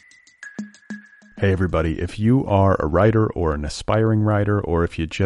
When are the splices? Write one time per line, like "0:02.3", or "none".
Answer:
0:00.9